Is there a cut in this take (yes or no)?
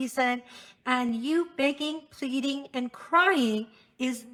no